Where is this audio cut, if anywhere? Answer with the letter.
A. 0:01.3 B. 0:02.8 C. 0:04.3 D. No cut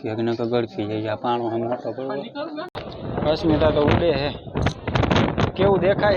B